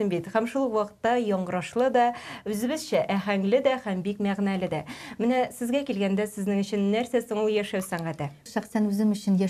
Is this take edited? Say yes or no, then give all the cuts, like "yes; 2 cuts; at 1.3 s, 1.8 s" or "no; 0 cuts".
yes; 1 cut; at 8.5 s